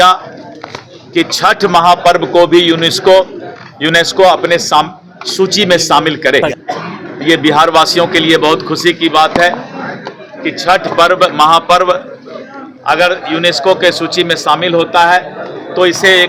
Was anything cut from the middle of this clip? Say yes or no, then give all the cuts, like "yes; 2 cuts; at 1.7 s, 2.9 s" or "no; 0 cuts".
no; 0 cuts